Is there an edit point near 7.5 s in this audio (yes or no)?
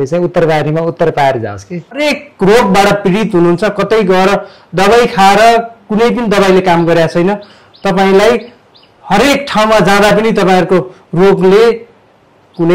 no